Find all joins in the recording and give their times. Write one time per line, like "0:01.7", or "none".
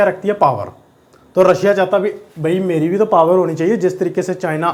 none